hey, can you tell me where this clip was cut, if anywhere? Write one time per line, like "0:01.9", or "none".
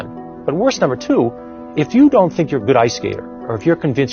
none

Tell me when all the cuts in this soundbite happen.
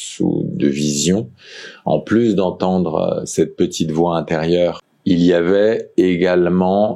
0:04.9

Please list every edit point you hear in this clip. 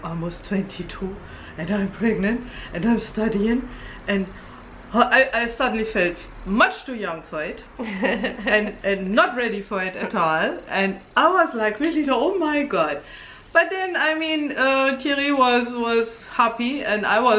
none

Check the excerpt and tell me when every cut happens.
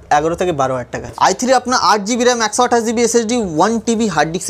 0:01.1

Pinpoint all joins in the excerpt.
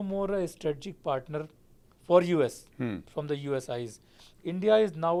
none

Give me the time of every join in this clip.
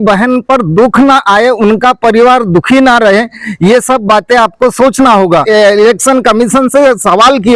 0:05.4

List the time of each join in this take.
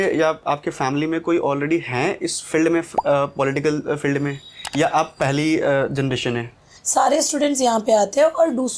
0:06.7

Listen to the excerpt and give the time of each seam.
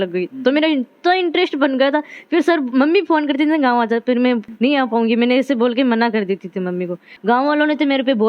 0:07.1

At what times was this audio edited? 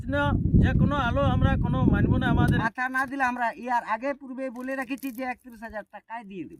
0:02.6

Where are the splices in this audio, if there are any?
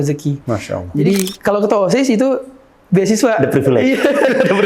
0:01.3

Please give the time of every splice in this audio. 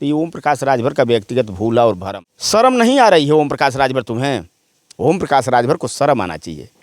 0:02.1

